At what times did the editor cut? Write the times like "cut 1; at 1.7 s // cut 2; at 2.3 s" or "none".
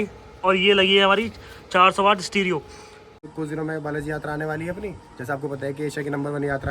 cut 1; at 3.3 s